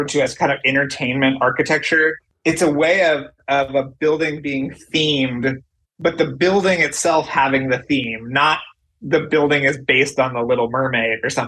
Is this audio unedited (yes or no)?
no